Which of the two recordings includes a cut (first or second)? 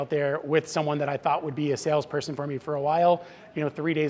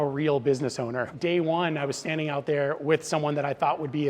second